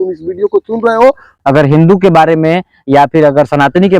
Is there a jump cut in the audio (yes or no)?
yes